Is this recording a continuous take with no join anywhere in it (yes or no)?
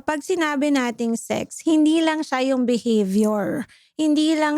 yes